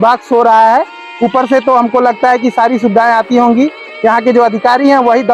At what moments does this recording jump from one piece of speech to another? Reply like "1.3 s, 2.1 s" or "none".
none